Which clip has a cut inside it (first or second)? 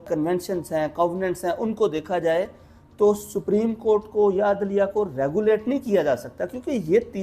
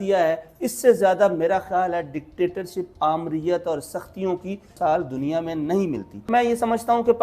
second